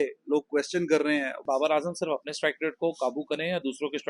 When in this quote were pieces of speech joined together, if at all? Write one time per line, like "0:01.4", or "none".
0:01.4